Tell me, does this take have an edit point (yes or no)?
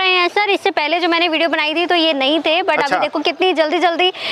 no